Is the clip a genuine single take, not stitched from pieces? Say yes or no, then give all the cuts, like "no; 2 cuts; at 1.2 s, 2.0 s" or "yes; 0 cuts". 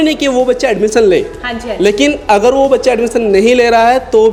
yes; 0 cuts